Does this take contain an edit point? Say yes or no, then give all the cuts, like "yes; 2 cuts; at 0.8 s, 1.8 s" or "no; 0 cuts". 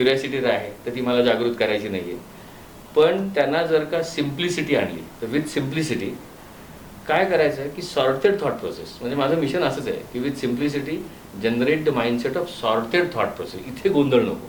no; 0 cuts